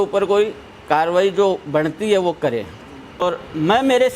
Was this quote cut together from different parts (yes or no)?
yes